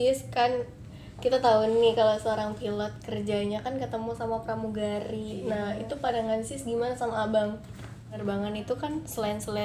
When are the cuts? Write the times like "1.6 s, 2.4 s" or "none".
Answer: 8.2 s